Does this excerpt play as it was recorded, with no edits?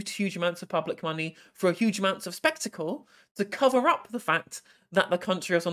yes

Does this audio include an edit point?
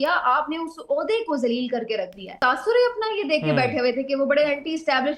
yes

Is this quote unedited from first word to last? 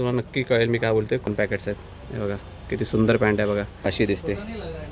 no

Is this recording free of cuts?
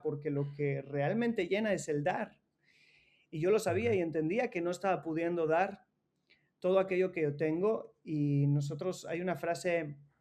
yes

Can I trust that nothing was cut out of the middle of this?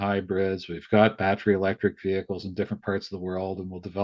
yes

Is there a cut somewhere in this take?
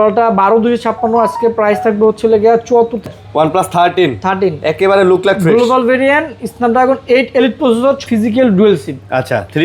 yes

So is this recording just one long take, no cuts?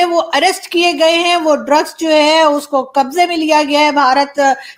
yes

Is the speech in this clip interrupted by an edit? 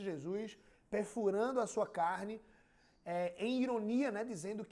no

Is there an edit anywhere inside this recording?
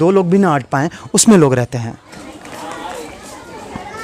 no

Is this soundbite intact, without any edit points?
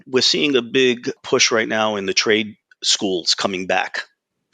no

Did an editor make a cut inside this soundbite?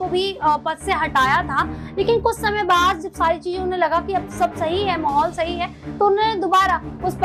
no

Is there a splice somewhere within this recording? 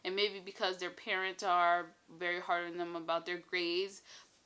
no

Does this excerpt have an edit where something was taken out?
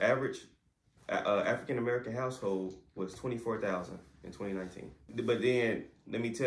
yes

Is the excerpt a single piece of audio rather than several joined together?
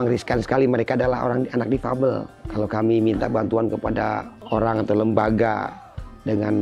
no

